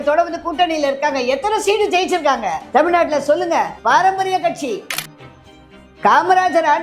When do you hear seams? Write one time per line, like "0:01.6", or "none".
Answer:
0:02.6
0:03.8
0:05.5